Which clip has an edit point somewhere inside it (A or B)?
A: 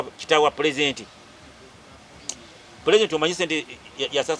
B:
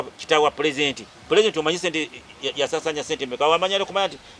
B